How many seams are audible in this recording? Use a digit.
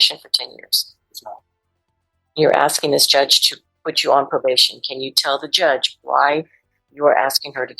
0